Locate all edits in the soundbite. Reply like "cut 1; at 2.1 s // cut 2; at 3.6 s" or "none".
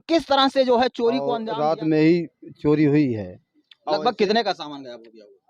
cut 1; at 1.4 s